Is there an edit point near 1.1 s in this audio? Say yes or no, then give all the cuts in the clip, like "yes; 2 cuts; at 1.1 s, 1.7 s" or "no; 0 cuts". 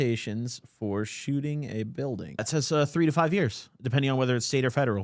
no; 1 cut; at 2.4 s